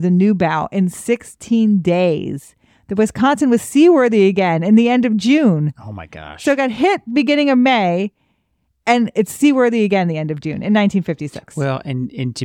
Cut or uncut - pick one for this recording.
uncut